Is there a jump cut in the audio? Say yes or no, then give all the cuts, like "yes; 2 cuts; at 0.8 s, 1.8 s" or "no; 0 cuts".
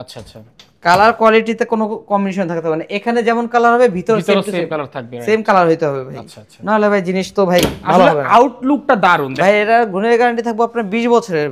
yes; 1 cut; at 9.4 s